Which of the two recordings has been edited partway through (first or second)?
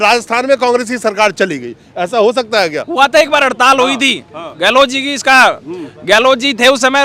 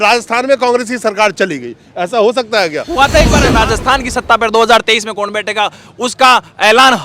second